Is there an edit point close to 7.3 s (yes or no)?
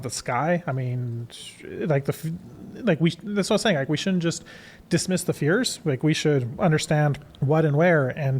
yes